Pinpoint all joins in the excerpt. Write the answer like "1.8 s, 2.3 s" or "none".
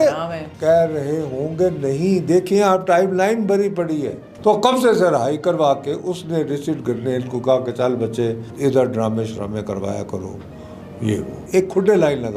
4.2 s, 11.4 s